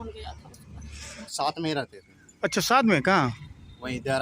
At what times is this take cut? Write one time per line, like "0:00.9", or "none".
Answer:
0:01.2